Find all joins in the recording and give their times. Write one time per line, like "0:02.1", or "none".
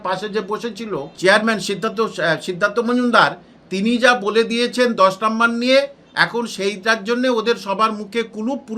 0:01.1